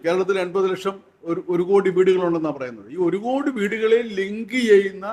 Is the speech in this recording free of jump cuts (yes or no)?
yes